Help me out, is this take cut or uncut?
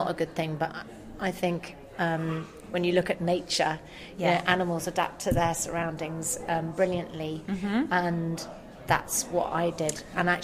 uncut